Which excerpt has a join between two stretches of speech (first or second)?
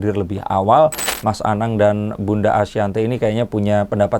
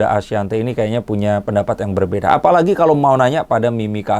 first